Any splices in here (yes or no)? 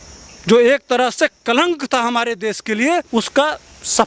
yes